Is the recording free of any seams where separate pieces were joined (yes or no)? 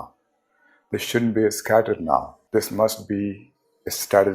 no